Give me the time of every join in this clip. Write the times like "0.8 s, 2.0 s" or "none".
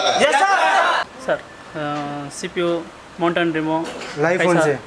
1.1 s